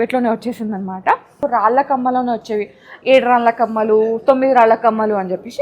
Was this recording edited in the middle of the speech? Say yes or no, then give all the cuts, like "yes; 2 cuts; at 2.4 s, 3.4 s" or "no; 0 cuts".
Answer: yes; 1 cut; at 1.4 s